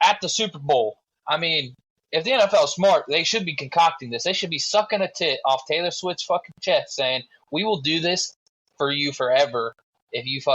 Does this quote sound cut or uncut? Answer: uncut